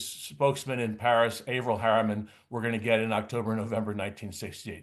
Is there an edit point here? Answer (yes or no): no